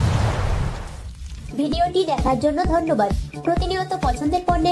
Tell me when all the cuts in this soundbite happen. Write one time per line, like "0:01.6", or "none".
none